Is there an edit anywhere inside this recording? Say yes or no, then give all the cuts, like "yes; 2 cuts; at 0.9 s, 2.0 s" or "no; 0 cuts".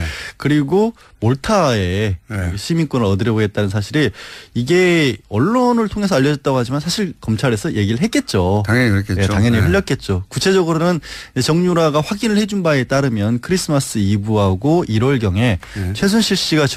no; 0 cuts